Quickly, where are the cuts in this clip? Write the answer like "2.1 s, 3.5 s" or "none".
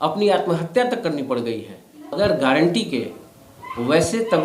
2.2 s